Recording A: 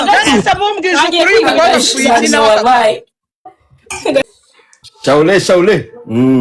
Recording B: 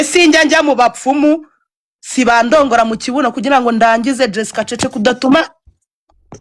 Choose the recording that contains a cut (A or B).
A